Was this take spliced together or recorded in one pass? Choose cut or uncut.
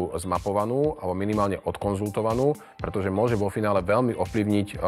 uncut